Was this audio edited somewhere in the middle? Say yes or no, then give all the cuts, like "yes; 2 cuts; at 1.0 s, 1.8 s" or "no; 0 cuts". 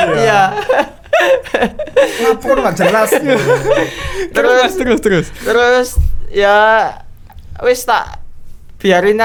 no; 0 cuts